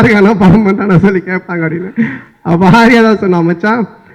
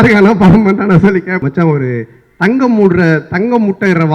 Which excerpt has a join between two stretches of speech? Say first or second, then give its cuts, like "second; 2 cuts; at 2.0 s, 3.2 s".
second; 1 cut; at 1.4 s